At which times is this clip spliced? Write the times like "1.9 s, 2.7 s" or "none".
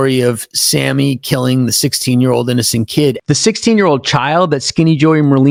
none